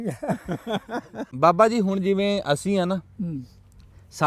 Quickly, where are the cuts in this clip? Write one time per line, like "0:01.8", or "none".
0:01.3